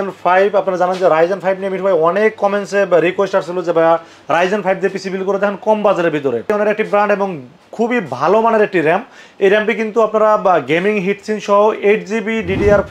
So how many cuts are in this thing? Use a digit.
1